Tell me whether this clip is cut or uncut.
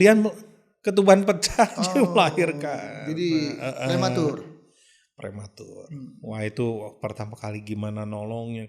uncut